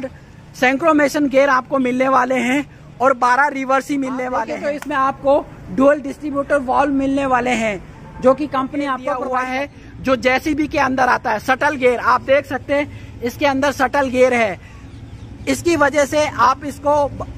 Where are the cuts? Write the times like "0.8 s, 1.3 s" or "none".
4.5 s, 9.1 s